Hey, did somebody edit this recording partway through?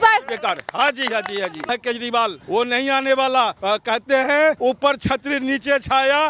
yes; 4 cuts; at 1.6 s, 2.4 s, 3.6 s, 4.6 s

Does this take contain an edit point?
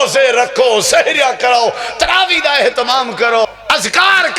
yes; 1 cut; at 3.4 s

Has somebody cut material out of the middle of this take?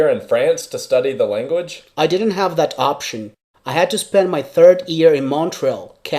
yes; 1 cut; at 1.8 s

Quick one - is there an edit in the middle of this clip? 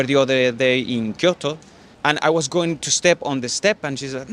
no; 0 cuts

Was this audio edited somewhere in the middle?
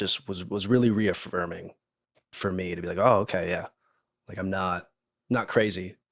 yes; 1 cut; at 5.1 s

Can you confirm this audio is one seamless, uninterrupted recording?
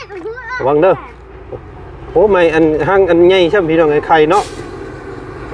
yes; 0 cuts

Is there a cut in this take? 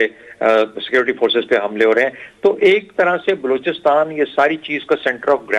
no; 0 cuts

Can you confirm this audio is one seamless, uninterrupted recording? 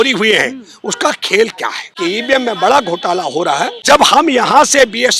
no; 2 cuts; at 1.8 s, 3.7 s

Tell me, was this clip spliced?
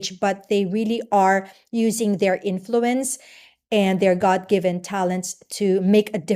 no; 0 cuts

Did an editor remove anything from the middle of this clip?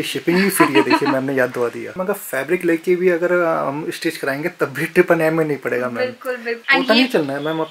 yes; 2 cuts; at 1.9 s, 6.6 s

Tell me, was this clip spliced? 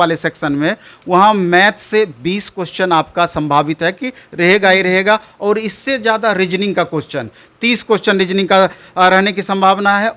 no; 0 cuts

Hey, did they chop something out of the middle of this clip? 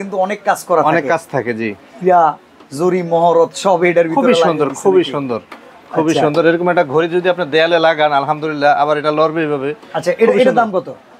no; 0 cuts

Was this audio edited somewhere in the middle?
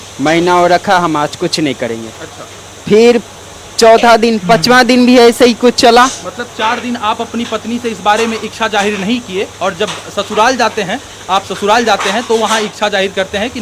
no; 0 cuts

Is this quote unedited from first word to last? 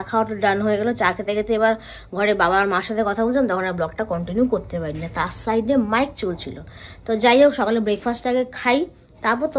yes; 0 cuts

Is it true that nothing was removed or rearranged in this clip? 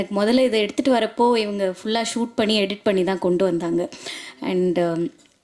yes; 0 cuts

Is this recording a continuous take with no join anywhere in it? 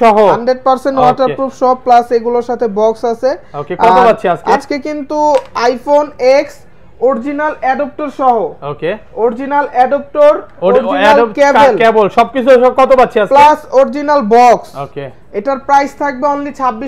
yes; 0 cuts

